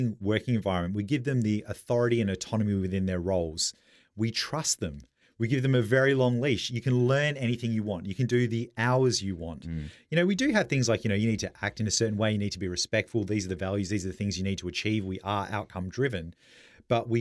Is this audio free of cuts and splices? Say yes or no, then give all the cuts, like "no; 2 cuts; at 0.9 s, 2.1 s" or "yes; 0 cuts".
yes; 0 cuts